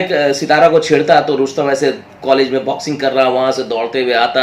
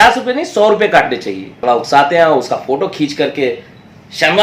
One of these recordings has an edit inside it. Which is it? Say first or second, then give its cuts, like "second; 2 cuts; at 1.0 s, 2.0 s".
second; 1 cut; at 1.6 s